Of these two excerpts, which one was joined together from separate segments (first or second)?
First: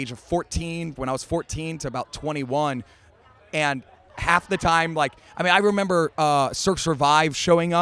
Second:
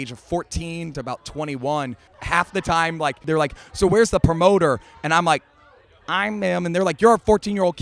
second